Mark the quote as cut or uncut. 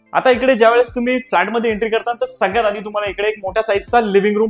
uncut